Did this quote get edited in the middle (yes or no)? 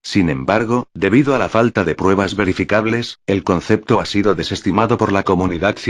yes